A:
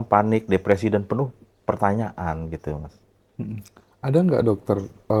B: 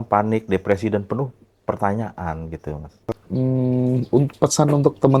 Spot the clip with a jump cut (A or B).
B